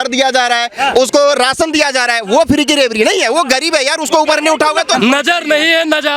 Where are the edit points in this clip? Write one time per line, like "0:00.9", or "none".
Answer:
0:05.0